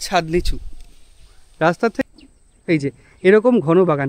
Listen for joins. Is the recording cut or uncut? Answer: cut